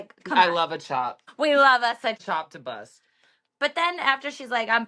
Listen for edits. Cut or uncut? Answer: cut